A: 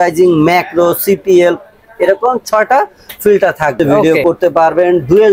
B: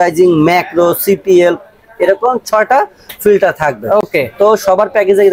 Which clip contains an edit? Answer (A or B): A